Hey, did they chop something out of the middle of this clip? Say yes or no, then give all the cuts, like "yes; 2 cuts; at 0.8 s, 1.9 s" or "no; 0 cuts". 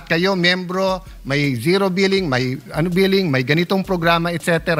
no; 0 cuts